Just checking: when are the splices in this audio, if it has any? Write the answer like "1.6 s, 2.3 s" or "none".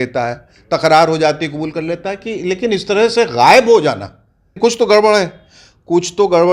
4.5 s